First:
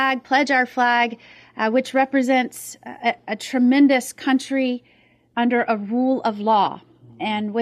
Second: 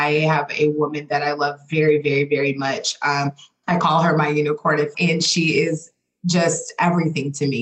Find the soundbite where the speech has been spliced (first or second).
second